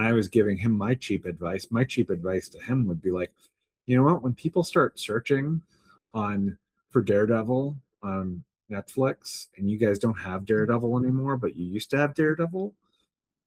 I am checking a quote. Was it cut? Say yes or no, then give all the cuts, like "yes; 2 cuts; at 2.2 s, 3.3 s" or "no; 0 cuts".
no; 0 cuts